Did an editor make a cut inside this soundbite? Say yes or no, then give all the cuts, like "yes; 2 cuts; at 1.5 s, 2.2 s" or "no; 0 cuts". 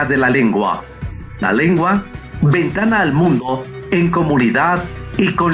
no; 0 cuts